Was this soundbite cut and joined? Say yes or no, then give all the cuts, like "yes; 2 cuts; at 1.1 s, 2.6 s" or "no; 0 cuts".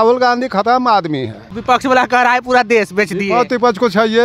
yes; 1 cut; at 1.5 s